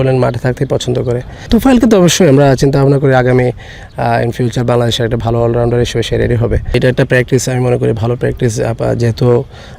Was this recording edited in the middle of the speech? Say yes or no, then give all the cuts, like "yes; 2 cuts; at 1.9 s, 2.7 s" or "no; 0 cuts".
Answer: yes; 2 cuts; at 1.5 s, 6.7 s